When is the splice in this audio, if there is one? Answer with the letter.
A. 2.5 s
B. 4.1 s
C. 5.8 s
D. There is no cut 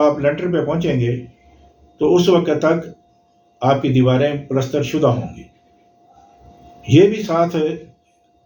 D